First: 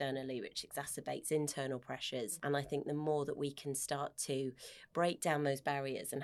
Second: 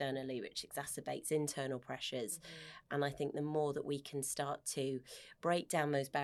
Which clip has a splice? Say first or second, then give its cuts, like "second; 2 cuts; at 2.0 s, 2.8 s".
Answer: first; 1 cut; at 2.3 s